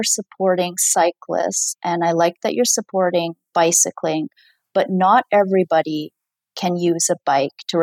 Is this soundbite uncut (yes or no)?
yes